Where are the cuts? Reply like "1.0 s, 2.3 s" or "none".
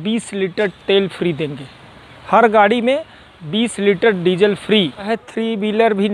5.1 s